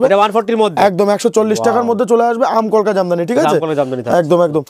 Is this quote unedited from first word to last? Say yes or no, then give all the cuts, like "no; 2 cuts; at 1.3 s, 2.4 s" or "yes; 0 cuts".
yes; 0 cuts